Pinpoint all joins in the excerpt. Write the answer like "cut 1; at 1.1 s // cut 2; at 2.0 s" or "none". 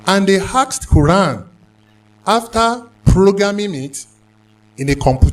cut 1; at 1.7 s

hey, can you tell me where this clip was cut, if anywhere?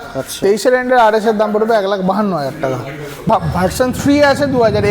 cut 1; at 3.2 s

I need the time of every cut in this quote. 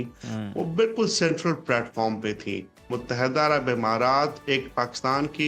cut 1; at 2.7 s

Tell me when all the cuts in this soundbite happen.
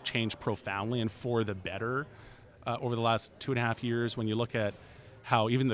none

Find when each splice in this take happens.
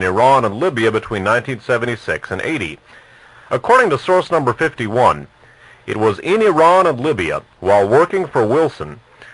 none

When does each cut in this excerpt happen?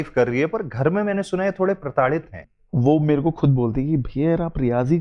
cut 1; at 2.4 s

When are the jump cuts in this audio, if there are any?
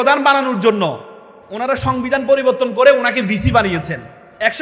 none

